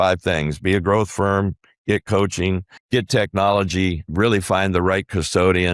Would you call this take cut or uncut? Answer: cut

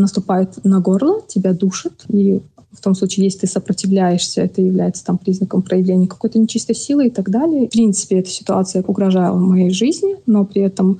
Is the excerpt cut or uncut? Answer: cut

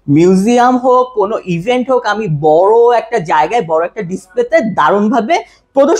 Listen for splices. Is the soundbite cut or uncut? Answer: uncut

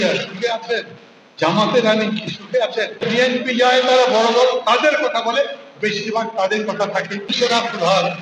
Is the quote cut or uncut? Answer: cut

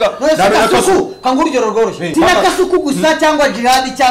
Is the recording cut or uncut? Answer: cut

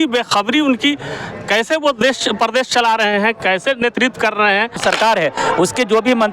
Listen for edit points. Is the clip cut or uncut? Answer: cut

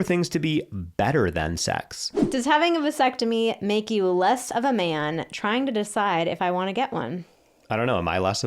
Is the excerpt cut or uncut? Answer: cut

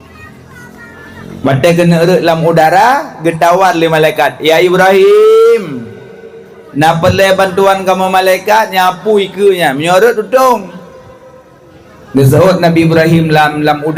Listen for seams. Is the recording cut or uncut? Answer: uncut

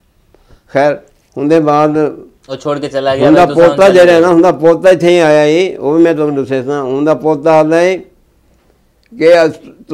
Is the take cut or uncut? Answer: uncut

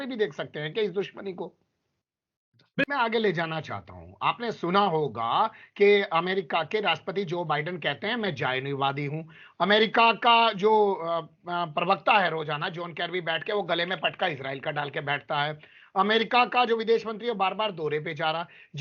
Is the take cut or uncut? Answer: cut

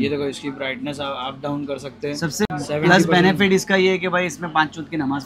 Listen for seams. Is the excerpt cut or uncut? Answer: uncut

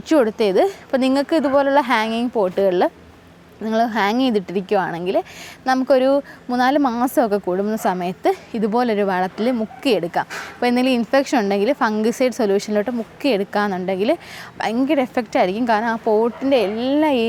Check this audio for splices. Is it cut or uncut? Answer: uncut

